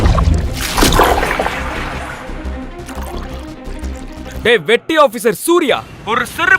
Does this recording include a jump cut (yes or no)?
yes